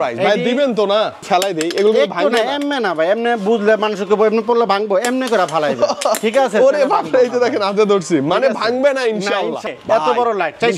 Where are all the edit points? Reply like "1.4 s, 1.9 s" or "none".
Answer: 1.3 s, 9.7 s